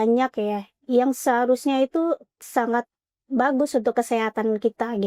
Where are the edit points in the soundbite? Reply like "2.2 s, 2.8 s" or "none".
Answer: 2.4 s